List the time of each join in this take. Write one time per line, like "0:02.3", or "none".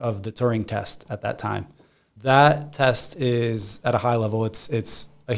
0:02.1